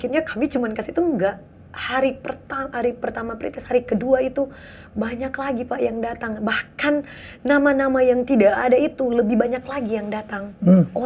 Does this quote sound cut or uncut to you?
uncut